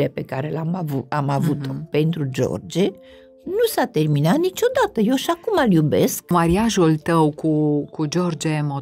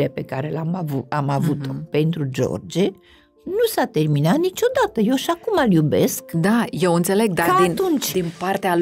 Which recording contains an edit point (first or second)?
first